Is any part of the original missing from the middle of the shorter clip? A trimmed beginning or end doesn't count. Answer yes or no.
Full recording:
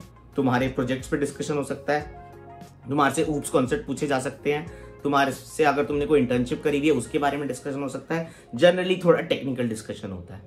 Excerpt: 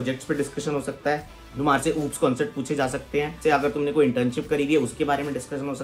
yes